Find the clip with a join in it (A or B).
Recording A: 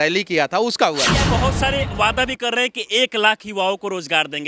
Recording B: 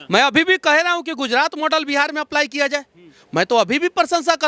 A